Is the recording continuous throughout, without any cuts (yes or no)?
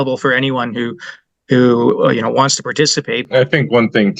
no